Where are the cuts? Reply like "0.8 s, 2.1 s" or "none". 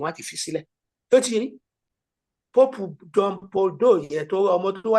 1.7 s